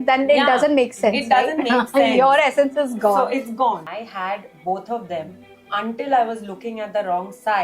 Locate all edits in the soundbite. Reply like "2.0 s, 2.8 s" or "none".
4.0 s